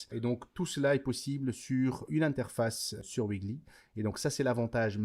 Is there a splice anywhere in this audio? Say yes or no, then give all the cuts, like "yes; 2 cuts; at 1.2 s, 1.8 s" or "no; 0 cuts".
yes; 2 cuts; at 2.1 s, 3.0 s